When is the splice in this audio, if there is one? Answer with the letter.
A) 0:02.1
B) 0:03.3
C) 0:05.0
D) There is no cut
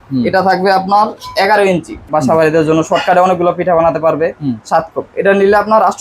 A